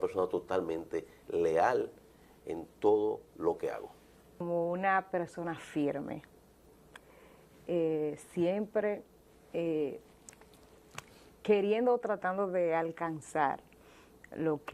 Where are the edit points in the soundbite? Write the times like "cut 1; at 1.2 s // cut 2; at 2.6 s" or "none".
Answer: cut 1; at 4.4 s